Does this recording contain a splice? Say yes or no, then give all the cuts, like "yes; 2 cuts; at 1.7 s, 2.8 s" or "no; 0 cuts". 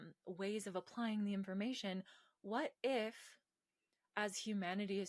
no; 0 cuts